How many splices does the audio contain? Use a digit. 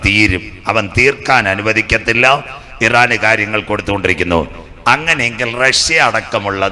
0